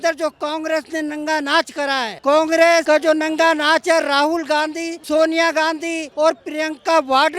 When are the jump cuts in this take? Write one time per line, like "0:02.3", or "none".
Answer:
0:02.1
0:02.8
0:04.9
0:06.0